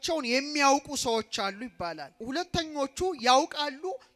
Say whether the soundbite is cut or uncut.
cut